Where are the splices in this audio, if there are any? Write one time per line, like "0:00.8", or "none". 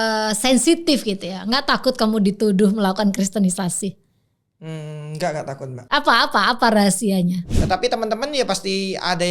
0:07.5